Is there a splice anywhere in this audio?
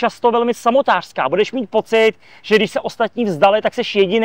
no; 0 cuts

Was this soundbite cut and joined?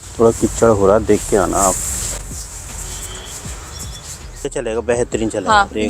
yes; 1 cut; at 4.5 s

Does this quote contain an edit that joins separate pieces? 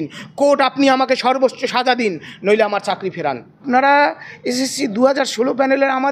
yes; 1 cut; at 3.5 s

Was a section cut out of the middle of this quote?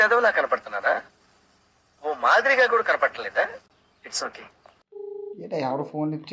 yes; 1 cut; at 4.8 s

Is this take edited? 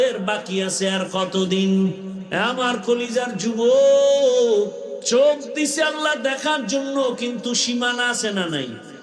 yes; 2 cuts; at 2.1 s, 4.9 s

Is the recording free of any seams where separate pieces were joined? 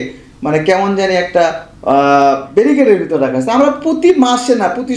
yes; 0 cuts

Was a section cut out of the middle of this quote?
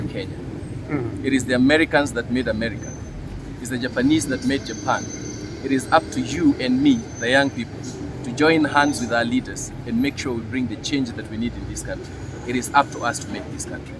no; 0 cuts

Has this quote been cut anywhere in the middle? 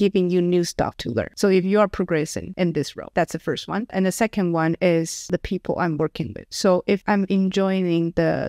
yes; 1 cut; at 3.1 s

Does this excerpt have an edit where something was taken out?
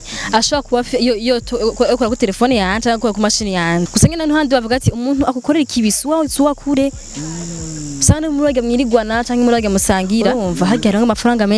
yes; 2 cuts; at 3.9 s, 10.4 s

